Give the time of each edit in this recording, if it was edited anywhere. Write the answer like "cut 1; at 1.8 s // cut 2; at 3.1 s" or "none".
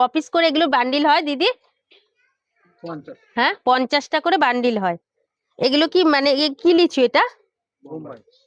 none